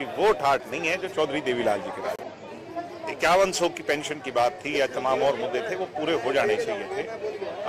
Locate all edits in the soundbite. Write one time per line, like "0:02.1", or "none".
0:02.2